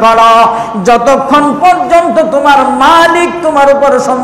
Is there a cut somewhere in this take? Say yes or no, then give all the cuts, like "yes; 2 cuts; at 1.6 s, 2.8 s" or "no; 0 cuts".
no; 0 cuts